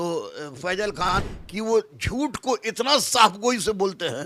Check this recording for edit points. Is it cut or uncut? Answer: cut